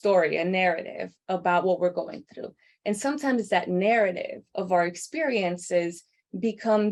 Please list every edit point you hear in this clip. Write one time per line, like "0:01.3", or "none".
none